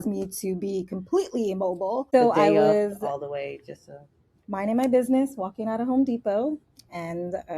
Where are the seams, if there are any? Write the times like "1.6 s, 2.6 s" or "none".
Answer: 2.1 s